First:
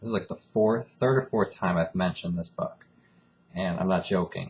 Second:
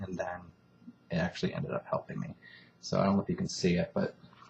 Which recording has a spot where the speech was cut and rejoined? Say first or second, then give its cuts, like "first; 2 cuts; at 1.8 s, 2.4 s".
second; 1 cut; at 1.9 s